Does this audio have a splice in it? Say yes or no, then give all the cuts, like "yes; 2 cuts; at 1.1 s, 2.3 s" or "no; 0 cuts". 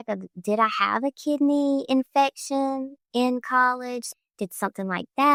no; 0 cuts